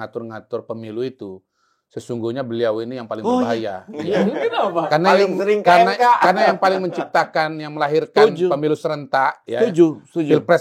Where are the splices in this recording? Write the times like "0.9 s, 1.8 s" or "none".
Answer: none